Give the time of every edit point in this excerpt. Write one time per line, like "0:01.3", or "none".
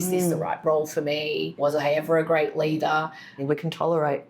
0:01.5
0:03.4